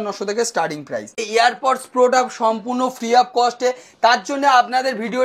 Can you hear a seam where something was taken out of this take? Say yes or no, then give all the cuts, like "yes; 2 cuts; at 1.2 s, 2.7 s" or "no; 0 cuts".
yes; 1 cut; at 1.2 s